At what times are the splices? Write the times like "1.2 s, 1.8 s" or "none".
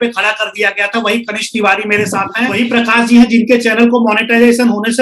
2.6 s